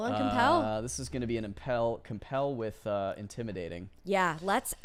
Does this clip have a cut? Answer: no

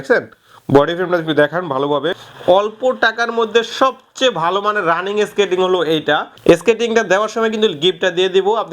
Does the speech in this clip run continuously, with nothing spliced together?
no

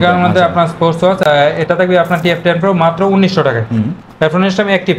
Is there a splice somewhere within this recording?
no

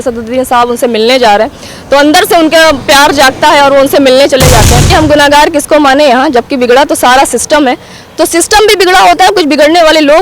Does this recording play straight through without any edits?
no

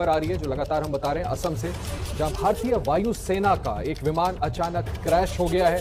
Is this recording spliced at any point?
no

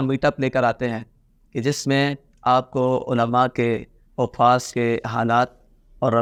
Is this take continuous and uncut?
yes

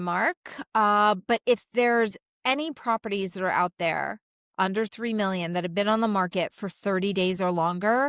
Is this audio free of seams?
yes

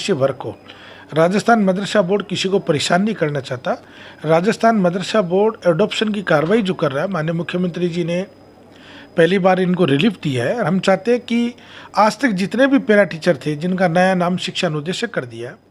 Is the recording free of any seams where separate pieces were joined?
yes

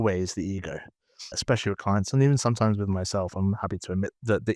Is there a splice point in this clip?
yes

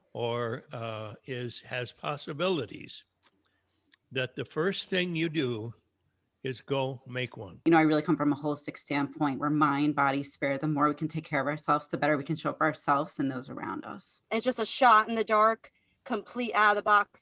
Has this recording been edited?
yes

